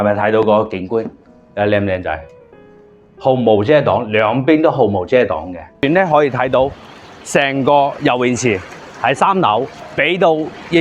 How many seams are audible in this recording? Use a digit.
2